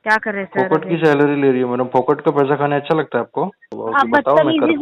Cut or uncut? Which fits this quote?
cut